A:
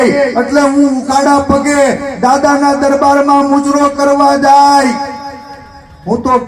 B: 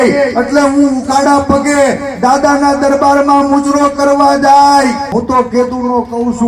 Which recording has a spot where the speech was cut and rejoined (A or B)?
B